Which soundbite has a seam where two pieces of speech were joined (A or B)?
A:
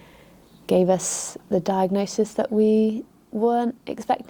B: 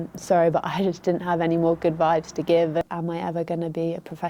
B